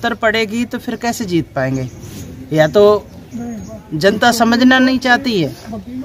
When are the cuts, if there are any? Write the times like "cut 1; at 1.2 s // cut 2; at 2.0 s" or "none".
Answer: none

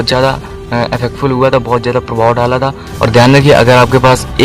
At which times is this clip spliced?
cut 1; at 2.8 s

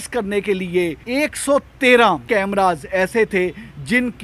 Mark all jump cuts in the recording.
cut 1; at 1.0 s // cut 2; at 2.2 s

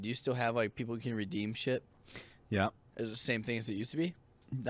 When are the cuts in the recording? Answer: cut 1; at 2.8 s

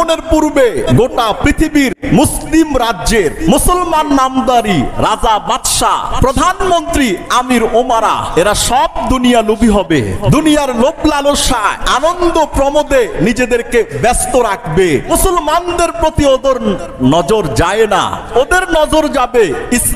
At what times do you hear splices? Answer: cut 1; at 0.8 s // cut 2; at 3.4 s // cut 3; at 6.1 s // cut 4; at 8.2 s // cut 5; at 10.2 s // cut 6; at 11.8 s // cut 7; at 15.1 s // cut 8; at 18.2 s

